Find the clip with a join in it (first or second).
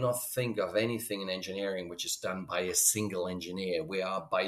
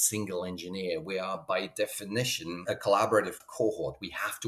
second